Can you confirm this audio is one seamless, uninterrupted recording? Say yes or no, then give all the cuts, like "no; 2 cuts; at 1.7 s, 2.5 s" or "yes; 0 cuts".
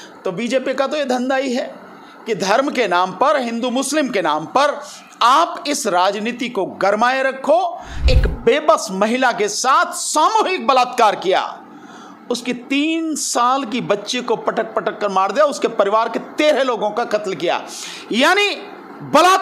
no; 1 cut; at 8.0 s